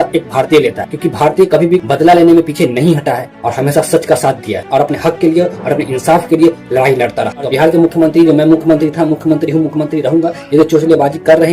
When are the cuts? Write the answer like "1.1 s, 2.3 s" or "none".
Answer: 7.5 s